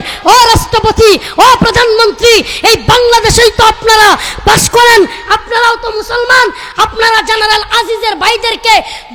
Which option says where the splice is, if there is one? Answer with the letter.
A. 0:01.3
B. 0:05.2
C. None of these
C